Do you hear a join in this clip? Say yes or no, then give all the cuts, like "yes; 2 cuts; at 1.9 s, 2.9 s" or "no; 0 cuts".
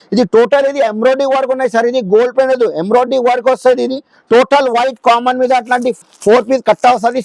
no; 0 cuts